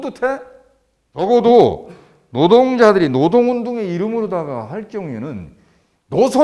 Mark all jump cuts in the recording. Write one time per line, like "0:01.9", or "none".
0:01.2

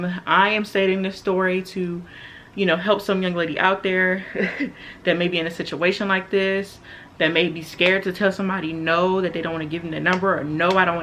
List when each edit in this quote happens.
none

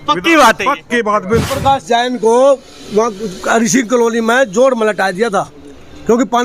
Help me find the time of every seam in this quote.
0:01.5

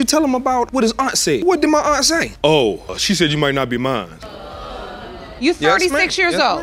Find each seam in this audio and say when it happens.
none

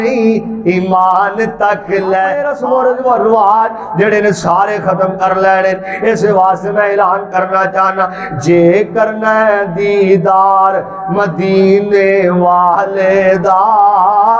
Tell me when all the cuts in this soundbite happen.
0:02.4

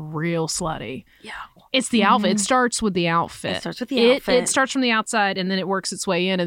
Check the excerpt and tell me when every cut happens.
0:01.5

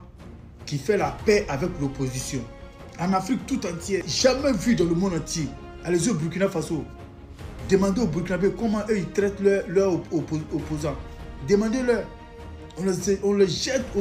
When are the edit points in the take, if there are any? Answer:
0:04.1

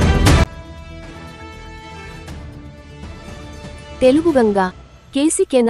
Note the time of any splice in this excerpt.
none

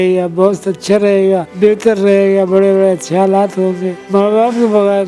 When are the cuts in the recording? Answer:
0:01.5
0:03.9

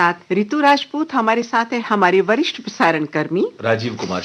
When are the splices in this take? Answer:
0:01.8

